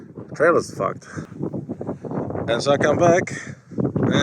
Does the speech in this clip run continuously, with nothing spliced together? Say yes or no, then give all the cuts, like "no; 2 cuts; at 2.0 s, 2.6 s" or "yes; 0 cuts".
no; 1 cut; at 1.3 s